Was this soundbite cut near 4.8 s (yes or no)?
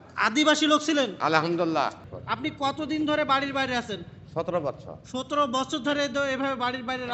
no